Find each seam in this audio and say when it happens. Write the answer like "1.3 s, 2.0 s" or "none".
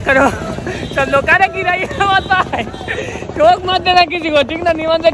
none

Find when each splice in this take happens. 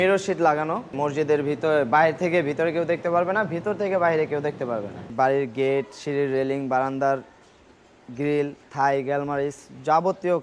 0.9 s, 5.1 s, 8.6 s

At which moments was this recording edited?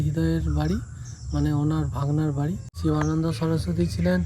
2.7 s

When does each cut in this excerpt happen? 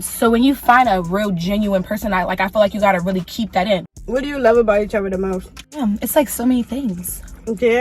4.1 s, 5.8 s

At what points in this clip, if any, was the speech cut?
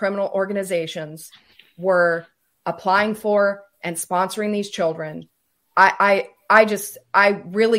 none

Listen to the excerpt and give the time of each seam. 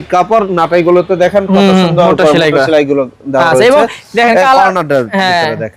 none

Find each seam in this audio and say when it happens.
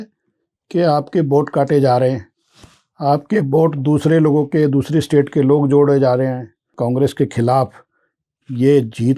6.7 s

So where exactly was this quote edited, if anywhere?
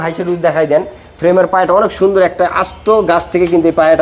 none

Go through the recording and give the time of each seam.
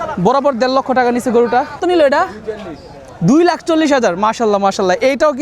1.8 s

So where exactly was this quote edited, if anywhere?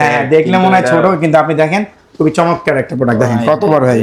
none

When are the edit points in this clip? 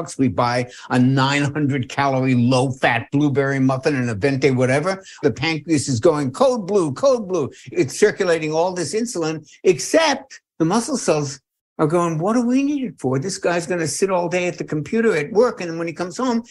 5.2 s, 7.7 s, 10.4 s

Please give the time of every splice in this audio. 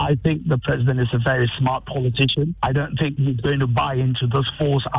none

